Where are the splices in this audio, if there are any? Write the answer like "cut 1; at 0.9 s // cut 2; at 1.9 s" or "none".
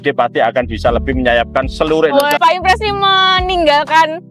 cut 1; at 2.4 s